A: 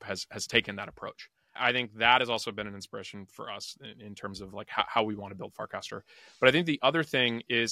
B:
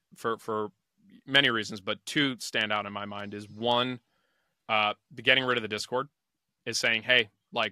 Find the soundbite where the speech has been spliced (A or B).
A